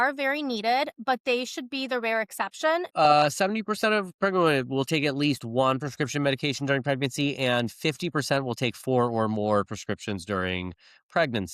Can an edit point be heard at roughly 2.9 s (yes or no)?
yes